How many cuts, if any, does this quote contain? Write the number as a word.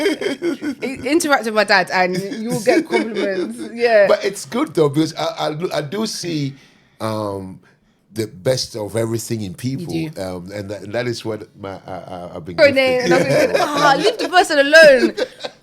one